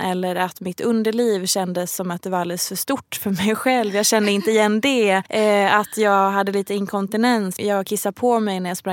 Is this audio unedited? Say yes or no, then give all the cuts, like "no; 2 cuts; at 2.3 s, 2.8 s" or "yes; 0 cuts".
no; 2 cuts; at 5.3 s, 7.5 s